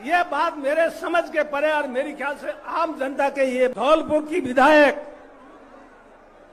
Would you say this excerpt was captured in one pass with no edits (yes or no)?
no